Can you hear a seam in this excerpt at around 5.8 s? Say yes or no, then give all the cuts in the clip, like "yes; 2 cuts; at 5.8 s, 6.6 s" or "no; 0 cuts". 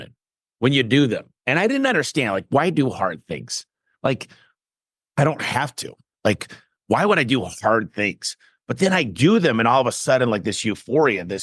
no; 0 cuts